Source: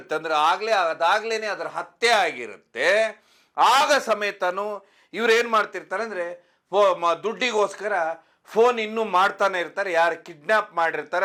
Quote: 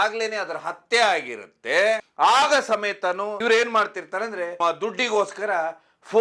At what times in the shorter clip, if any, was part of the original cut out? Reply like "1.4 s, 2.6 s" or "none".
2.1 s, 3.4 s, 4.6 s